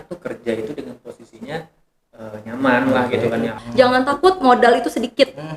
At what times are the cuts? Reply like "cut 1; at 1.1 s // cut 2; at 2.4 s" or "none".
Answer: cut 1; at 3.6 s